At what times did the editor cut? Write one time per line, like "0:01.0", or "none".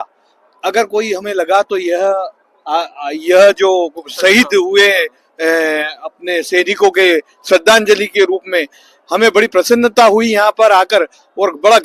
0:01.2

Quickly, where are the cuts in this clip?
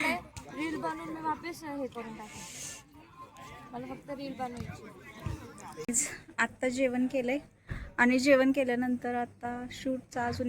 0:05.9

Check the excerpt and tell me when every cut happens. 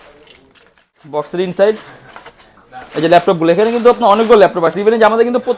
0:01.1

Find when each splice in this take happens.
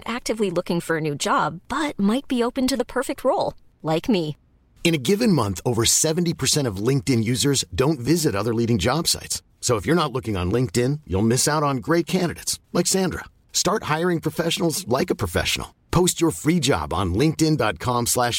none

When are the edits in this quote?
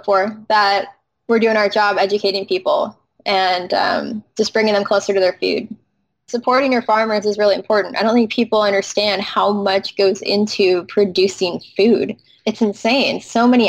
0:06.3

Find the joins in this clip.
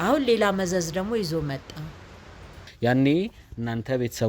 0:02.6

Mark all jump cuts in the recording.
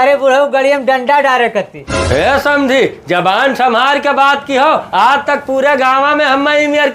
0:02.0

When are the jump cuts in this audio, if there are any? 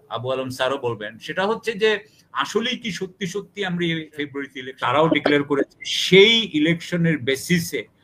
0:04.6

